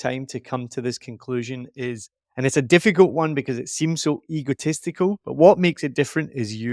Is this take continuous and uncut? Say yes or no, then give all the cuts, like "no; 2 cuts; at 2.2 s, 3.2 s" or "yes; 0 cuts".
yes; 0 cuts